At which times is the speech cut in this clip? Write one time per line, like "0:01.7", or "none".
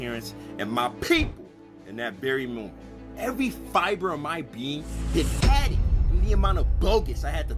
none